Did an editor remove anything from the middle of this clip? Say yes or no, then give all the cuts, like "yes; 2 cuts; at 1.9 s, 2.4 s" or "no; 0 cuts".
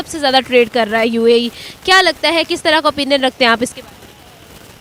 no; 0 cuts